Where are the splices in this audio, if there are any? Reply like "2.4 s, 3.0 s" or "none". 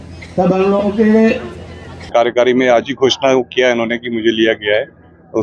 2.1 s